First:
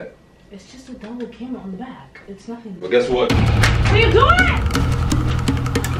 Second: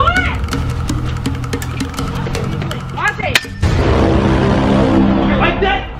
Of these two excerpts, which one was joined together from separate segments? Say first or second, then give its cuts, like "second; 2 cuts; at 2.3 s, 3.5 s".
second; 1 cut; at 2.8 s